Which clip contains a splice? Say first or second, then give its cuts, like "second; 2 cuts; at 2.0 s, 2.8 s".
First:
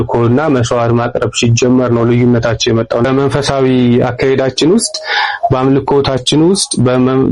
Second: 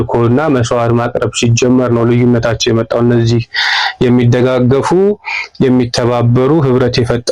first; 1 cut; at 3.0 s